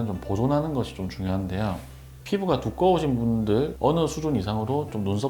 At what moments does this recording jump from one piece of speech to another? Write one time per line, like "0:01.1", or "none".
0:01.9